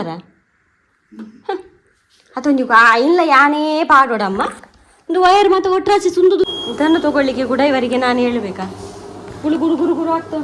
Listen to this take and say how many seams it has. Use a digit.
1